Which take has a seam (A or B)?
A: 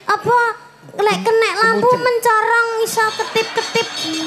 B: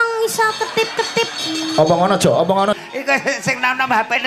B